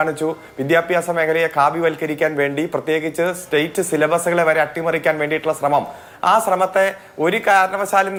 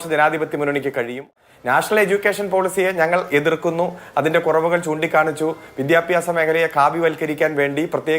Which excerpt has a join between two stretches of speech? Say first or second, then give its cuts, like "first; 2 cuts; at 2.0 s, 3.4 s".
second; 1 cut; at 1.3 s